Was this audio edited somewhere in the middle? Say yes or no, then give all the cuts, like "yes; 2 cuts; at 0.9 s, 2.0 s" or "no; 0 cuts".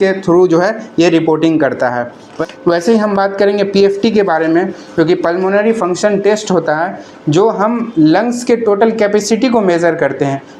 yes; 1 cut; at 2.3 s